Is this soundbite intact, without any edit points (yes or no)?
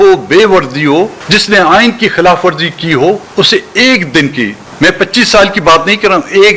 yes